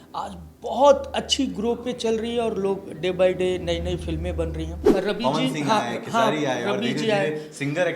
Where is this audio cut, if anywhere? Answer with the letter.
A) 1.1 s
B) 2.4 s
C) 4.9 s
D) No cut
C